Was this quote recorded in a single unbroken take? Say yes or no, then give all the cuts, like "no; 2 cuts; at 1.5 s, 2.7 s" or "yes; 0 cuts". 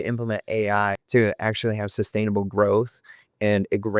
no; 1 cut; at 1.0 s